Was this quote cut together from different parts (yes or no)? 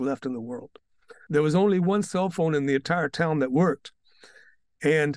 yes